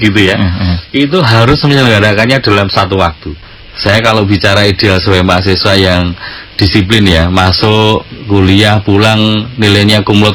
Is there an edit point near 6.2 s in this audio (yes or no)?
no